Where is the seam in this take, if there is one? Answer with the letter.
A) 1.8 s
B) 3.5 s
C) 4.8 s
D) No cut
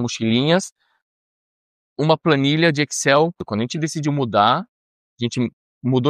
B